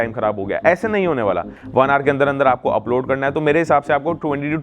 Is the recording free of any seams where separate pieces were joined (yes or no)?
no